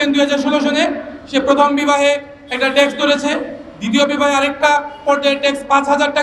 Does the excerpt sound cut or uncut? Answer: uncut